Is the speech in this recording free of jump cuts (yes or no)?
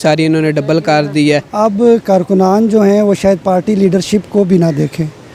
no